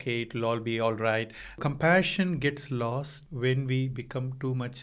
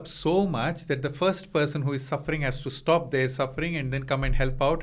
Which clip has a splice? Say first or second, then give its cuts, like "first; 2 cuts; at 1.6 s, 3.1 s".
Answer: first; 2 cuts; at 1.6 s, 3.2 s